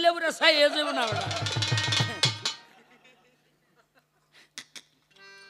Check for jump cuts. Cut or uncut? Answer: cut